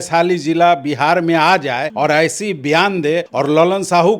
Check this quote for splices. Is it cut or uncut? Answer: cut